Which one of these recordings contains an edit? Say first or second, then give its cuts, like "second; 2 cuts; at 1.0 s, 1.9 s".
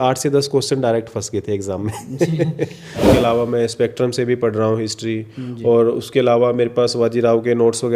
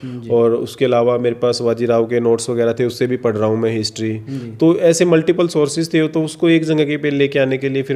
first; 1 cut; at 3.0 s